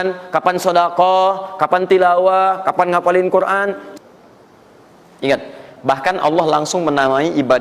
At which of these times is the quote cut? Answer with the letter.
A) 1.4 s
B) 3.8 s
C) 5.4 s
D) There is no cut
B